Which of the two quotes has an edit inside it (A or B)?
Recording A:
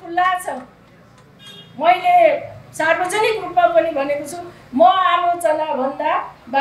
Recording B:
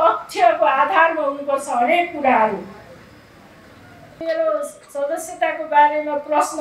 B